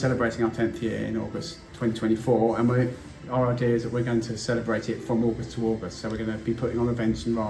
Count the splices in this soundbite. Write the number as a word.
zero